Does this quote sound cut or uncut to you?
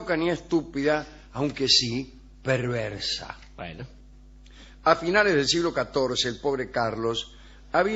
cut